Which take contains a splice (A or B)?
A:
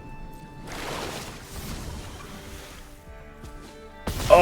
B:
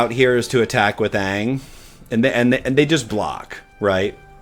A